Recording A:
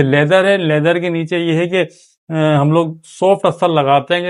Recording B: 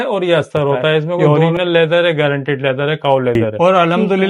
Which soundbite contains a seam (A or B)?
B